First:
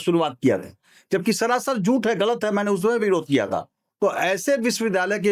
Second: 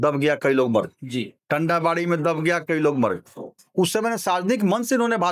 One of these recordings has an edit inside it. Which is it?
second; 1 cut; at 3.6 s

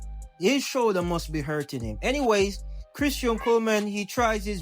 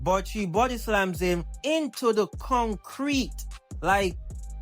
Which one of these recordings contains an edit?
first; 1 cut; at 3.6 s

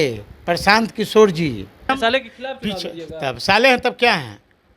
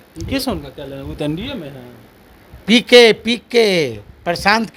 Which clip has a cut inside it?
first; 1 cut; at 1.9 s

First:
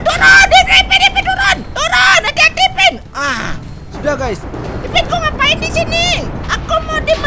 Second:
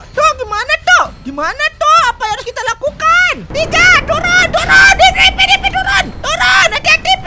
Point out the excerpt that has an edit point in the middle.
second; 1 cut; at 3.5 s

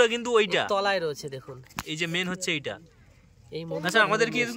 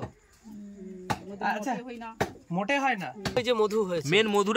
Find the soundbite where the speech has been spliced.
second; 1 cut; at 3.4 s

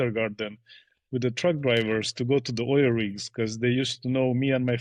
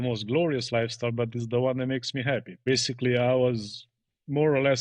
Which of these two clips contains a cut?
second; 1 cut; at 2.5 s

